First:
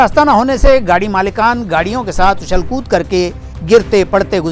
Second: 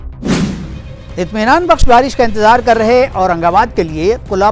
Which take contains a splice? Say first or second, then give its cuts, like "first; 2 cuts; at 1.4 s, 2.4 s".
second; 1 cut; at 0.9 s